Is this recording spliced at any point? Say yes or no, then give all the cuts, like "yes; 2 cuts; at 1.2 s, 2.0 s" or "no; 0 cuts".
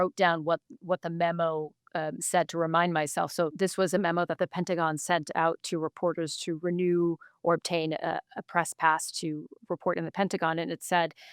yes; 1 cut; at 3.5 s